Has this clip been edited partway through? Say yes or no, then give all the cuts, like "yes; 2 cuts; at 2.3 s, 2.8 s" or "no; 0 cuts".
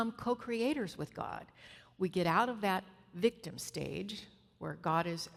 no; 0 cuts